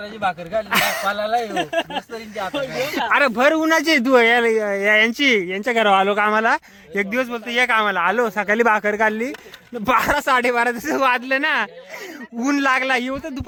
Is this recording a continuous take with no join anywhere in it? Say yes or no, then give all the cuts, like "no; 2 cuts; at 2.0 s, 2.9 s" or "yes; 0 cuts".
yes; 0 cuts